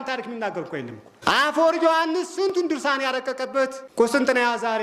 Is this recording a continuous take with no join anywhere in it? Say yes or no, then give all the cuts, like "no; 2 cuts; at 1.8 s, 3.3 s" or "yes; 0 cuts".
no; 2 cuts; at 1.0 s, 3.8 s